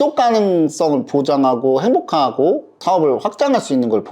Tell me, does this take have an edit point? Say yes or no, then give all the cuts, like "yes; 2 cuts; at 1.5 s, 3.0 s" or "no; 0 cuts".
yes; 1 cut; at 2.8 s